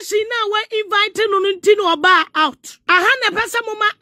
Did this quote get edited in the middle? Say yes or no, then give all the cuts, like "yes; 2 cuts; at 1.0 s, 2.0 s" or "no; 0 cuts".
yes; 1 cut; at 2.7 s